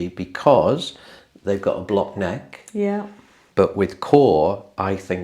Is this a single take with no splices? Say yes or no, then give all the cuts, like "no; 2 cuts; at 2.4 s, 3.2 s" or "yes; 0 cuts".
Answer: no; 1 cut; at 3.4 s